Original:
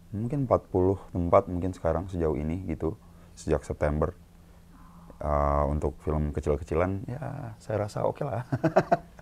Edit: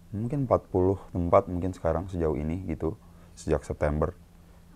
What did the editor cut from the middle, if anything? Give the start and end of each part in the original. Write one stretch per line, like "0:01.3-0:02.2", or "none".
none